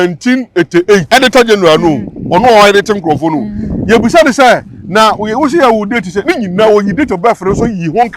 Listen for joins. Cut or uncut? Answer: cut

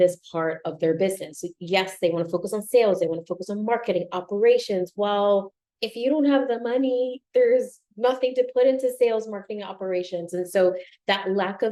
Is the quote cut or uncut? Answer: uncut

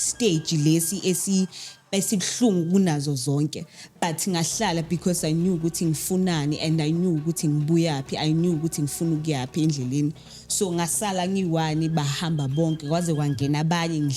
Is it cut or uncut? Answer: uncut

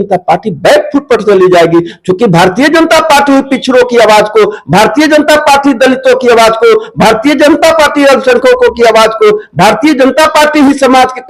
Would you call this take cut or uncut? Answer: uncut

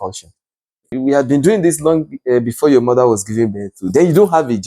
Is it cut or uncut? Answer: cut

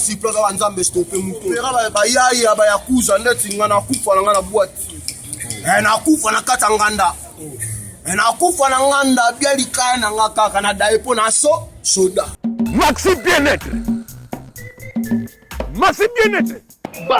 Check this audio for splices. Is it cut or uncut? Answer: cut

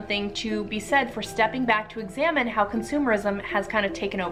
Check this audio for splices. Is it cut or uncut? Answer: uncut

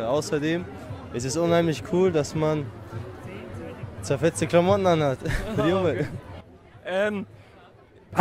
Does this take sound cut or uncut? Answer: uncut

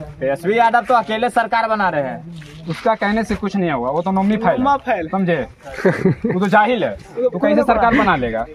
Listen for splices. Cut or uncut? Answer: uncut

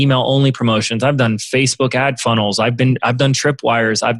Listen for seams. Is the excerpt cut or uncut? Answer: uncut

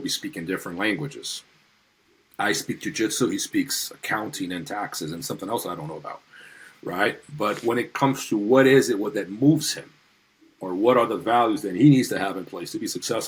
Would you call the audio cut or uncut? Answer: uncut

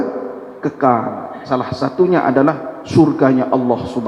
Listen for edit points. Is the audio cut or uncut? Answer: uncut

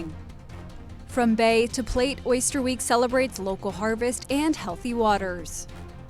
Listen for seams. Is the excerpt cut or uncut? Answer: uncut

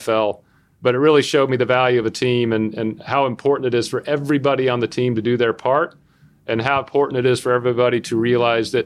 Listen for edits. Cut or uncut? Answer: uncut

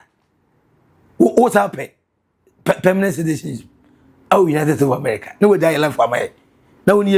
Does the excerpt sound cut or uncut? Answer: uncut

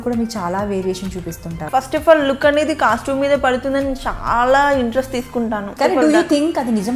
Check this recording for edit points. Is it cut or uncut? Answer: cut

